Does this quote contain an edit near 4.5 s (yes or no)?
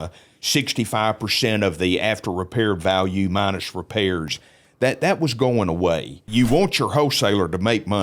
no